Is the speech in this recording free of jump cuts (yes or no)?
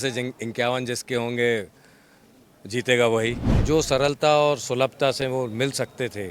no